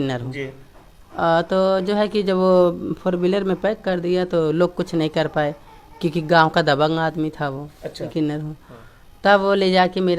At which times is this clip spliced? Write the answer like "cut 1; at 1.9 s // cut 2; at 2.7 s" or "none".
cut 1; at 8.1 s

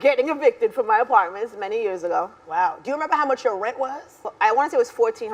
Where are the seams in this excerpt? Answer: cut 1; at 4.2 s

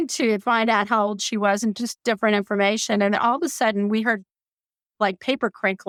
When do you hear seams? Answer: none

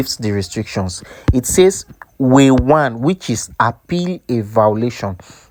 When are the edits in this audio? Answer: none

